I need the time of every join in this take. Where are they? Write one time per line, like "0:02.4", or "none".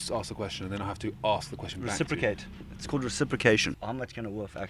0:03.8